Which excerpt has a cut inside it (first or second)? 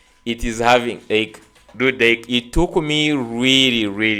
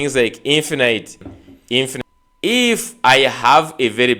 second